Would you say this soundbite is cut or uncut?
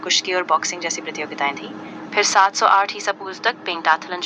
uncut